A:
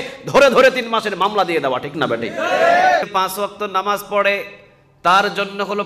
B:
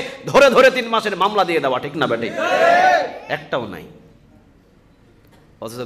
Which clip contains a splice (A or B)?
A